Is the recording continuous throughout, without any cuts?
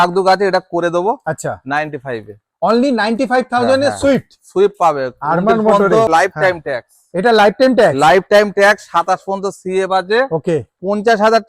no; 1 cut; at 6.1 s

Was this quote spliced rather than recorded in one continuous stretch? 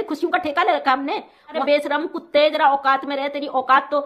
yes; 1 cut; at 1.6 s

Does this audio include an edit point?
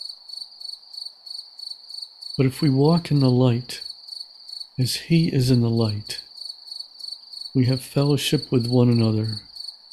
yes; 1 cut; at 2.3 s

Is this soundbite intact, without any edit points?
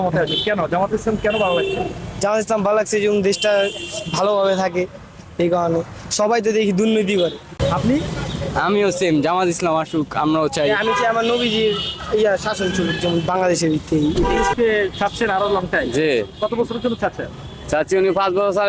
no; 2 cuts; at 7.5 s, 14.5 s

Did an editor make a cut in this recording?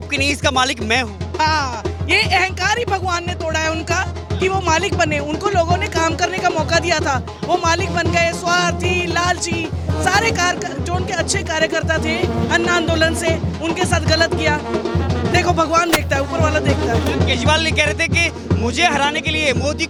no; 0 cuts

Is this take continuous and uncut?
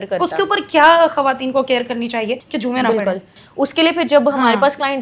no; 2 cuts; at 2.5 s, 3.4 s

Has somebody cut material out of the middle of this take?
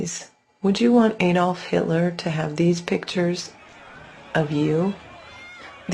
yes; 1 cut; at 3.3 s

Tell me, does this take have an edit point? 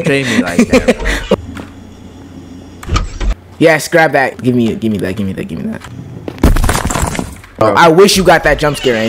no; 0 cuts

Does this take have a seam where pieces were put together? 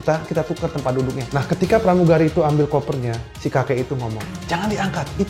yes; 1 cut; at 1.3 s

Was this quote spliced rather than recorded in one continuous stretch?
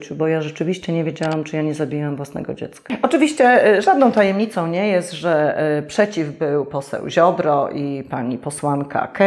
yes; 1 cut; at 2.8 s

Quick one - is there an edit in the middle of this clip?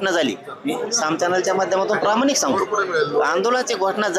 no; 0 cuts

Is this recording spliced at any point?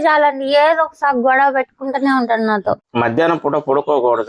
no; 0 cuts

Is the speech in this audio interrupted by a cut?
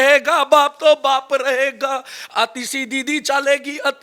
no; 0 cuts

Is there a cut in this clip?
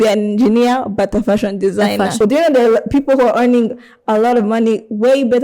yes; 1 cut; at 2.2 s

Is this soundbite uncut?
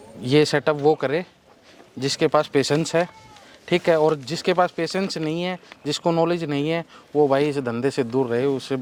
yes; 0 cuts

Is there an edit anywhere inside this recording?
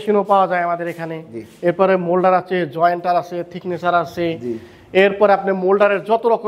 no; 0 cuts

